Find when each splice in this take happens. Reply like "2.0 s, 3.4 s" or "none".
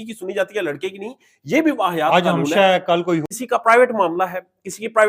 3.2 s

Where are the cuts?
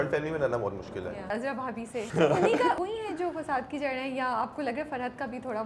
1.4 s, 2.8 s

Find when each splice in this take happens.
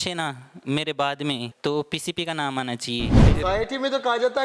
1.5 s, 3.2 s

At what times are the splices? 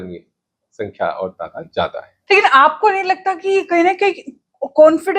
2.1 s

